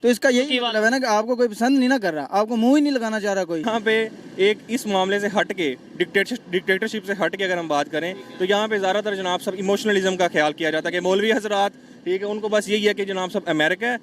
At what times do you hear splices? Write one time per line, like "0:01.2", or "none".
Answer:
0:03.6